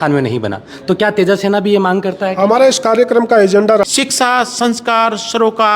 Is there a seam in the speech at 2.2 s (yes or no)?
no